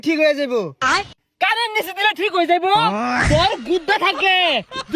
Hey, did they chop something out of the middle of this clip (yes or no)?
yes